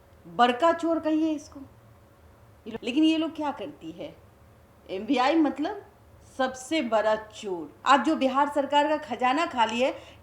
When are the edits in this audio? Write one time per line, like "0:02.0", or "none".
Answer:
0:02.7
0:07.7